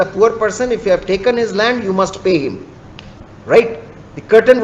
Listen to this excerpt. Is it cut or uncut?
uncut